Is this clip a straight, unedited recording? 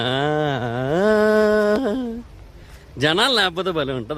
yes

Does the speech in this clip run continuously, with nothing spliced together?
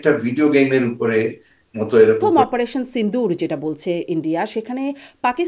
no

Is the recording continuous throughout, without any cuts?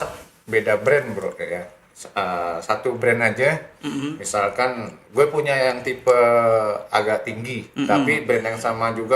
no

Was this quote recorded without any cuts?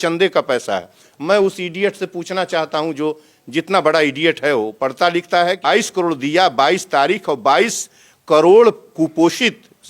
no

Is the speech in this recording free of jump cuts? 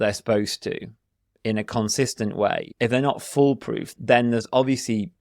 no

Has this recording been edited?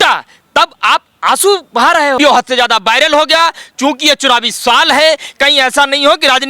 yes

